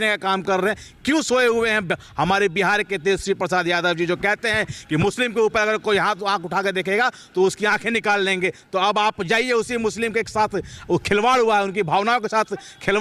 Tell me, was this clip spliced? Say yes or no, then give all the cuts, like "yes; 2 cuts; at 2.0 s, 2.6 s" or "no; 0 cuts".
no; 0 cuts